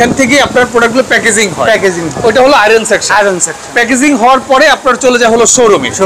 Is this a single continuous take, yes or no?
yes